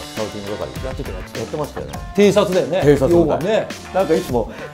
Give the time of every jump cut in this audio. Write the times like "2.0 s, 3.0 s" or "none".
2.0 s, 3.8 s